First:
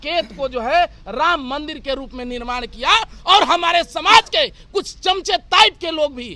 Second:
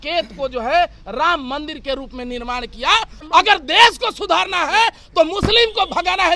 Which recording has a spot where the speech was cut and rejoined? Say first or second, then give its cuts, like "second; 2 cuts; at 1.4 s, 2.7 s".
second; 1 cut; at 3.1 s